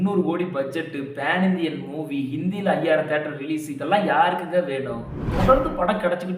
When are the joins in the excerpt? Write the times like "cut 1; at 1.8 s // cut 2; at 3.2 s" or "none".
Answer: cut 1; at 5.2 s